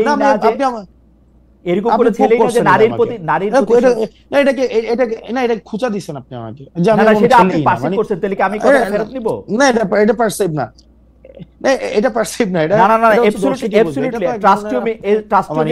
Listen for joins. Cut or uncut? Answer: uncut